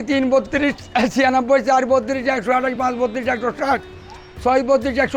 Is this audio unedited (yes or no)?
yes